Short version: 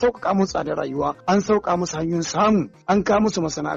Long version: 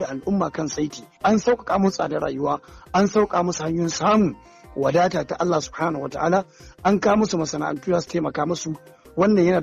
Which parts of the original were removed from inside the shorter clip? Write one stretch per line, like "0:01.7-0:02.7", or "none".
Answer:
0:02.6-0:02.8
0:04.4-0:06.7